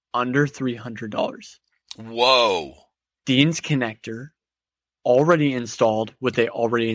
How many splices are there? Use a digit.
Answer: 0